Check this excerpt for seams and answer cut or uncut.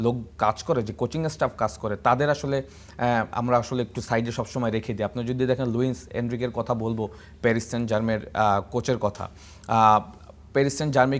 uncut